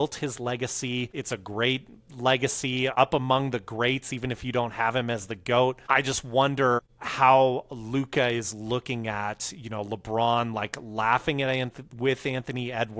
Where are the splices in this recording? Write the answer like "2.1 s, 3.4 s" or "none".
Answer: 1.2 s, 2.9 s, 5.8 s, 6.8 s